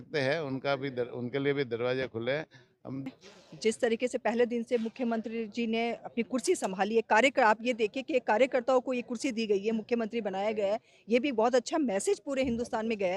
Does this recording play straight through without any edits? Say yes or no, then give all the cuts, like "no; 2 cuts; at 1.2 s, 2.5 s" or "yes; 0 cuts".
no; 1 cut; at 3.0 s